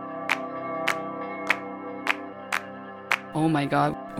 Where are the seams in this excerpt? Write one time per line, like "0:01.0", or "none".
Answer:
0:02.4